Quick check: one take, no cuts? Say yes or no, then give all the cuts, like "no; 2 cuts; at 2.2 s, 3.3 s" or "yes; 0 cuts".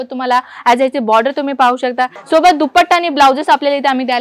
no; 1 cut; at 2.1 s